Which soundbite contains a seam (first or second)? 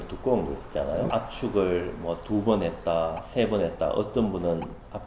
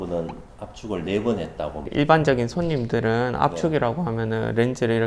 second